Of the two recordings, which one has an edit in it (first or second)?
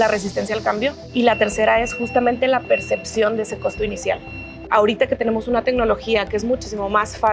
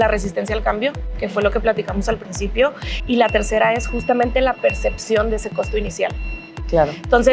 first